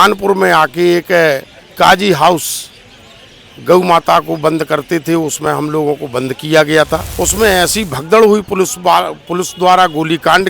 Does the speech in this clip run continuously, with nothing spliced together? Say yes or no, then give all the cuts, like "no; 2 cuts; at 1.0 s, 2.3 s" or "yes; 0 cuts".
no; 1 cut; at 7.0 s